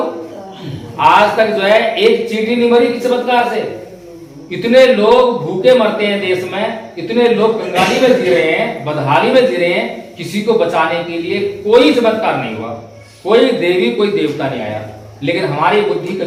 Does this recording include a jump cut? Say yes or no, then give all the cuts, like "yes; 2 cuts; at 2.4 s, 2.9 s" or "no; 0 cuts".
no; 0 cuts